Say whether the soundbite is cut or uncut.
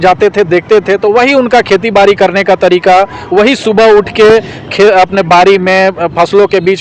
uncut